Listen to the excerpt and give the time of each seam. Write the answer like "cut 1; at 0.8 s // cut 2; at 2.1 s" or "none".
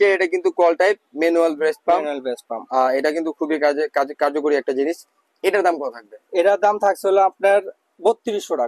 none